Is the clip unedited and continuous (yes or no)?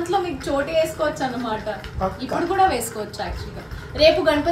yes